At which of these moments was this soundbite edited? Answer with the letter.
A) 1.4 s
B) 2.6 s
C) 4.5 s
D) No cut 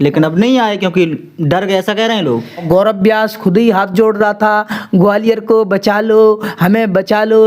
B